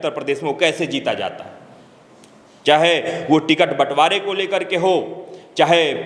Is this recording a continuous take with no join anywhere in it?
yes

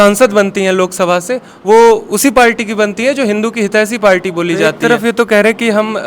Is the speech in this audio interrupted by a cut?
yes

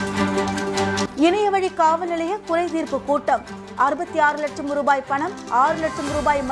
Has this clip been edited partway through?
yes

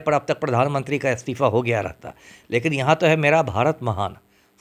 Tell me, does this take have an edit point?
no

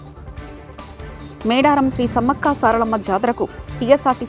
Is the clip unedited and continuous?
no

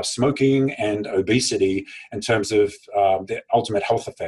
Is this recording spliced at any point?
no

